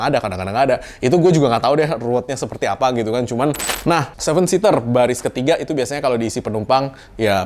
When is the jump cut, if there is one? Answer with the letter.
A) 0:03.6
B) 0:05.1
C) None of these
A